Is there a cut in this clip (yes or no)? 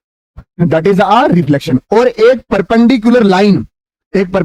no